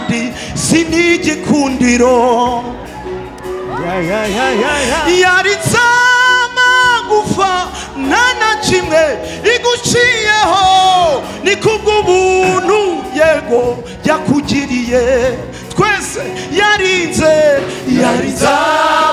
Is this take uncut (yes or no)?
yes